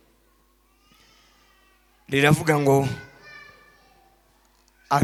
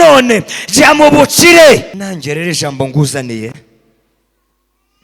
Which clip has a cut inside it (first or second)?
second